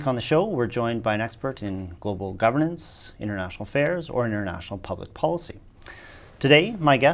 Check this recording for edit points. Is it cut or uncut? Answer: cut